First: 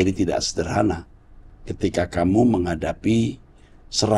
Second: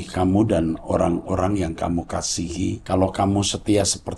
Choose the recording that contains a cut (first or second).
second